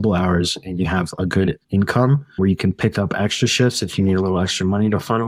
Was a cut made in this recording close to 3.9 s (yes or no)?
no